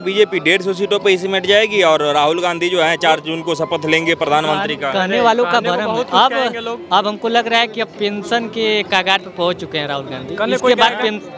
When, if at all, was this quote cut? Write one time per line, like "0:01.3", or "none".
none